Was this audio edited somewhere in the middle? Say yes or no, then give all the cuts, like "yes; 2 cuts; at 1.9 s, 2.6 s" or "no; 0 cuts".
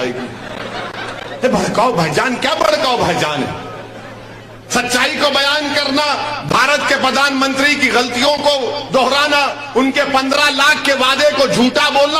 no; 0 cuts